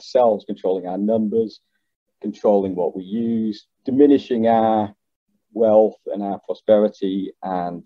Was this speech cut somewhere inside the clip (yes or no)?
no